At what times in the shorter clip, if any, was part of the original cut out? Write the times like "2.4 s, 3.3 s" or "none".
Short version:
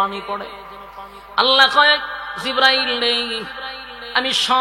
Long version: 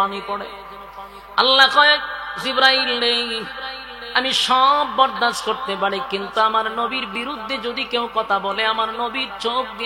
none